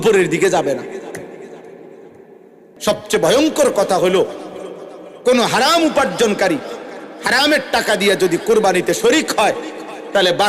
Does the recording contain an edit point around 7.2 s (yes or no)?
no